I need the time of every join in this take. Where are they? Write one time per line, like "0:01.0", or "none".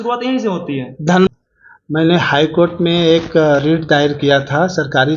0:01.3